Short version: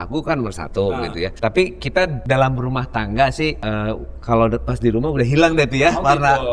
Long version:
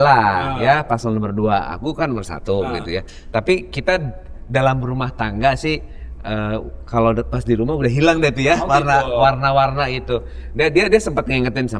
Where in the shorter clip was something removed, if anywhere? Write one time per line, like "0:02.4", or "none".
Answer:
0:01.3
0:02.2
0:03.6

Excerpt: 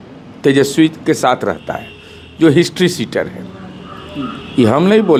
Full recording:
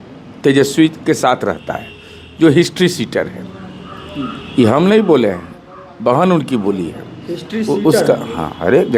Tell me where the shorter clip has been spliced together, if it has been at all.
none

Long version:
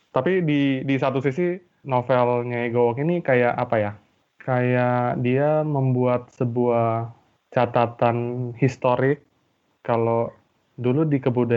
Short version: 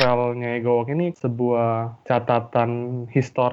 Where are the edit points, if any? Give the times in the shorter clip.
0:01.1
0:01.9

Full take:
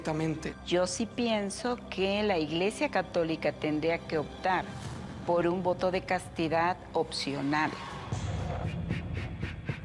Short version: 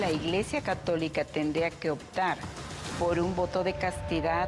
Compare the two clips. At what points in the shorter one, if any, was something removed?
none

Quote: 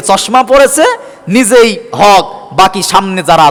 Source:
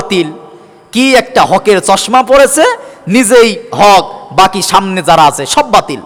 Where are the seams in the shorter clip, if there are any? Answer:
none

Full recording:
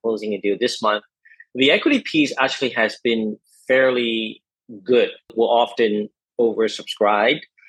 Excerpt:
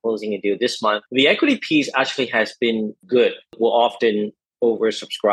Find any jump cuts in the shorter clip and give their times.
0:01.0
0:03.0

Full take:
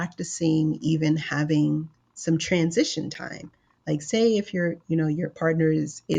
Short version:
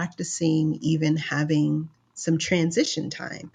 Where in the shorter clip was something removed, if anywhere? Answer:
none

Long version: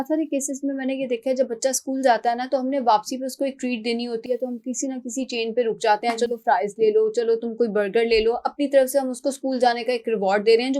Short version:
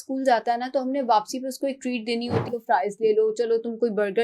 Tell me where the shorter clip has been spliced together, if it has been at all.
0:02.5

